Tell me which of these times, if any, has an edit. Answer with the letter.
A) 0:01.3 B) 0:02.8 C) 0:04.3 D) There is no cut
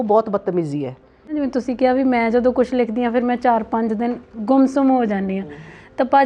A